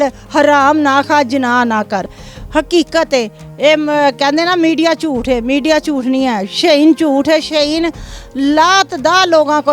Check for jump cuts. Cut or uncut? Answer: cut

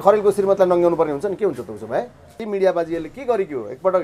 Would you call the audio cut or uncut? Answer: cut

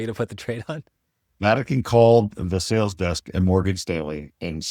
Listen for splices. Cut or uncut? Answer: uncut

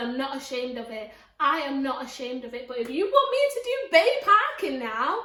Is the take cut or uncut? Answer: uncut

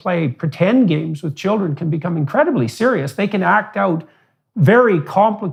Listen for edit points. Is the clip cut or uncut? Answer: uncut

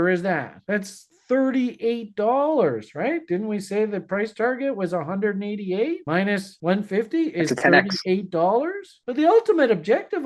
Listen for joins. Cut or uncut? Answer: cut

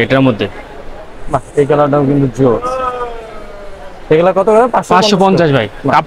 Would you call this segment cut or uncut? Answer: uncut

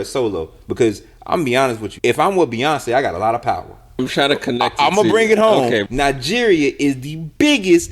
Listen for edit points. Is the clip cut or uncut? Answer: cut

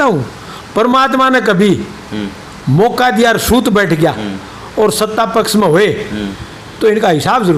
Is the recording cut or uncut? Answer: uncut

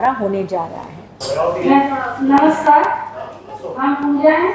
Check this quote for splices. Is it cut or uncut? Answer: uncut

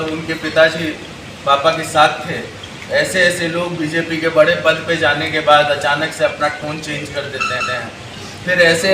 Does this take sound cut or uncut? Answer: uncut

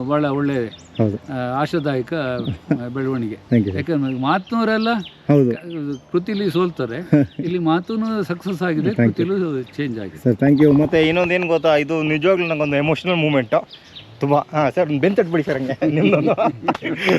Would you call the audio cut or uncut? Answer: uncut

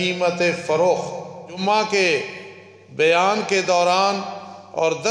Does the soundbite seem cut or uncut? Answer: cut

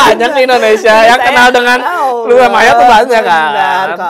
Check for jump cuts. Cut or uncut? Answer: uncut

